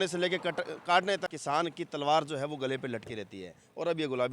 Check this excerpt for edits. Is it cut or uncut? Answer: cut